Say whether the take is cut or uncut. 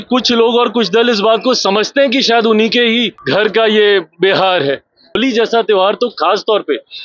cut